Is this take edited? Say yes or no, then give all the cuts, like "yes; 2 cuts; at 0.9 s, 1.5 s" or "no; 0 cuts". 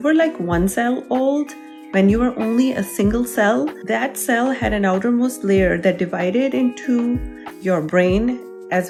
no; 0 cuts